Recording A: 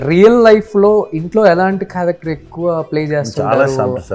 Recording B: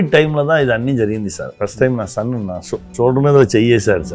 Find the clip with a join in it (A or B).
B